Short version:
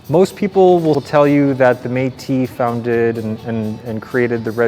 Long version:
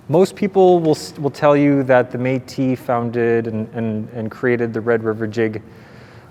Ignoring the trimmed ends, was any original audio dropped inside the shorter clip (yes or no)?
yes